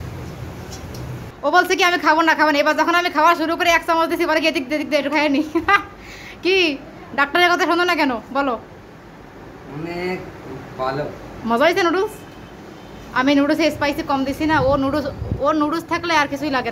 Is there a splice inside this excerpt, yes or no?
yes